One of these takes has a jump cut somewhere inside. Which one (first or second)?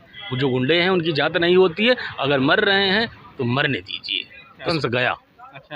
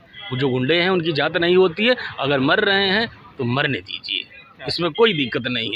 first